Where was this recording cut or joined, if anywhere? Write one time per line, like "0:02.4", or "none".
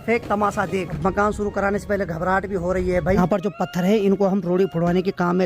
0:00.9
0:03.2